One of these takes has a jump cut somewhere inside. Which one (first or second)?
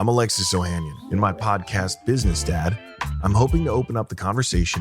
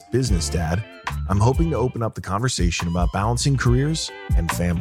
first